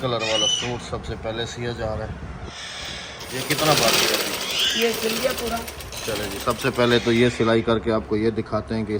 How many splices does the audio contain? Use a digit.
0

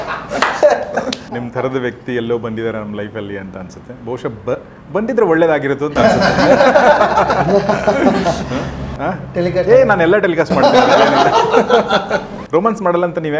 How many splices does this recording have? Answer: 3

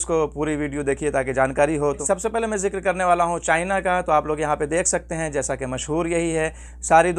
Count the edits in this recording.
0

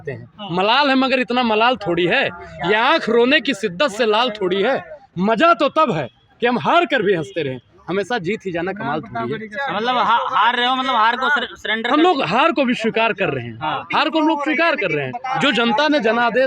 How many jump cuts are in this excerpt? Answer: 0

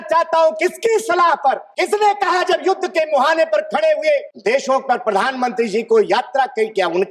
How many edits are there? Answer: 2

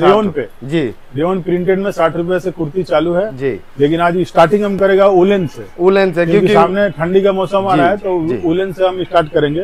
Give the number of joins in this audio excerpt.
0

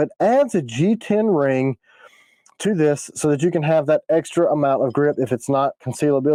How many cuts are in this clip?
0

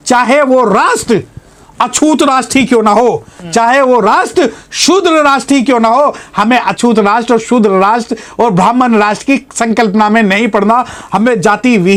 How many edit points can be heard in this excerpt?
0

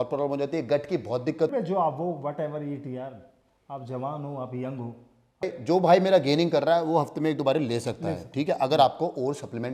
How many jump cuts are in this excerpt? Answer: 2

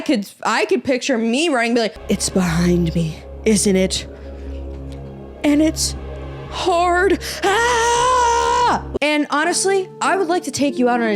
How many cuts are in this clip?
1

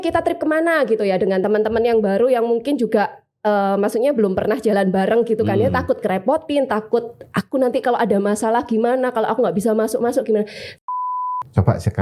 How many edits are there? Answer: 1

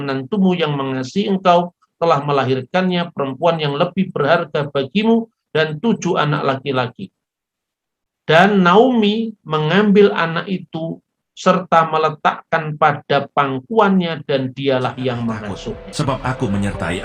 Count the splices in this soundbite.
1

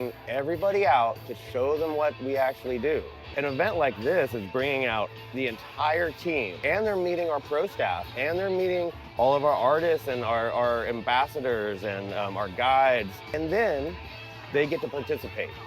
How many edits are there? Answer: 3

